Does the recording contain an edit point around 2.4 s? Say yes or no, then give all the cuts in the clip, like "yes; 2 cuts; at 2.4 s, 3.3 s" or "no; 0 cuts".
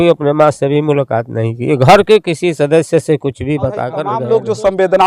no; 1 cut; at 4.1 s